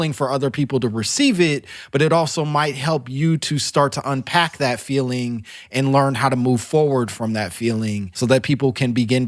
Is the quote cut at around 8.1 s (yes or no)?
yes